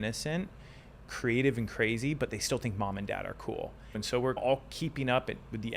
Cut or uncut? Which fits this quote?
cut